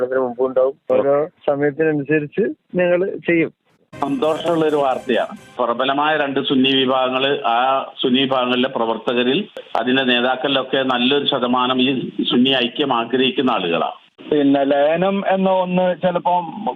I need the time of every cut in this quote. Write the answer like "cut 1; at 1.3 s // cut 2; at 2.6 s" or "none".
cut 1; at 3.8 s // cut 2; at 14.1 s